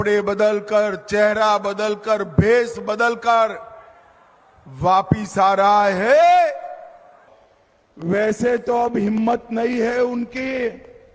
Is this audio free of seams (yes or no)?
yes